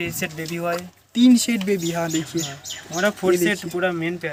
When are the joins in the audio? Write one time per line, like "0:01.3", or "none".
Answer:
none